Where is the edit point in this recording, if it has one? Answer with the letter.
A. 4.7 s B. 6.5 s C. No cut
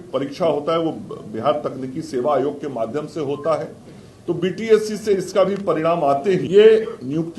B